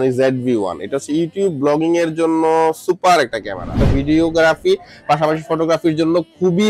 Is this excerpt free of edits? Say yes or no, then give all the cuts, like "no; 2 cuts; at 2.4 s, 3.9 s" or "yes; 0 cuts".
no; 1 cut; at 3.8 s